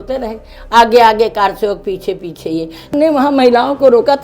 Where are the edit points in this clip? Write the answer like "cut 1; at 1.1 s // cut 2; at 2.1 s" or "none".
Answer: cut 1; at 2.9 s